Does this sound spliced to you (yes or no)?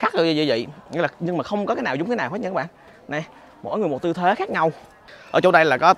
no